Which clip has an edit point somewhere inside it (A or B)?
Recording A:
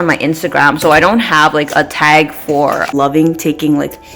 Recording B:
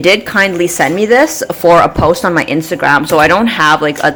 A